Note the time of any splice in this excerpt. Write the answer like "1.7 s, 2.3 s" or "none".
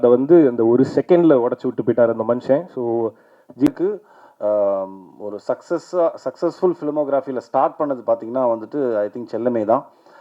3.7 s